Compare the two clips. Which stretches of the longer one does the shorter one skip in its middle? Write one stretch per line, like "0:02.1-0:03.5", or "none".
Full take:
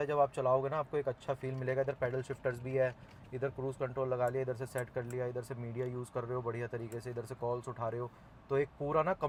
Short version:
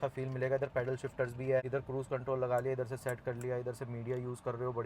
0:02.9-0:03.4